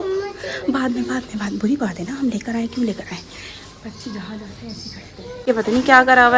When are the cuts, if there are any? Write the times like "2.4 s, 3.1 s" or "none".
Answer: 5.5 s